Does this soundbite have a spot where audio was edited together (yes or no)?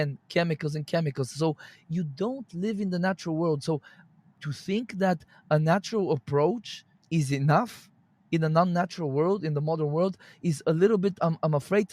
yes